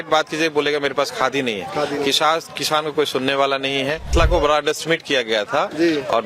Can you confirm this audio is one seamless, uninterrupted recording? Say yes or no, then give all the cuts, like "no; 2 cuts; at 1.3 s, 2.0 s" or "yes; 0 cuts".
no; 1 cut; at 4.1 s